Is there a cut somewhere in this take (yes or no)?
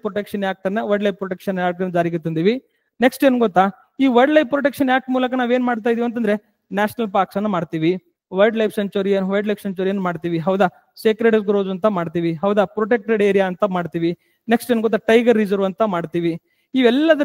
no